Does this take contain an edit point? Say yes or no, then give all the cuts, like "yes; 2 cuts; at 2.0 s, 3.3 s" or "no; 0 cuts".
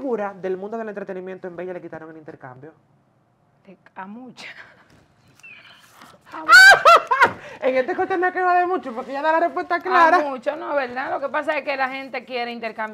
no; 0 cuts